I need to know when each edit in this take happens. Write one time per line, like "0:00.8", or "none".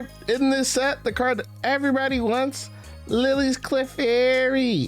none

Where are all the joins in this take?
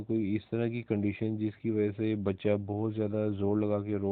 none

